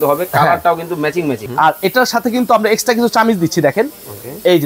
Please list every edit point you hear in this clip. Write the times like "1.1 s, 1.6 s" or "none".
1.4 s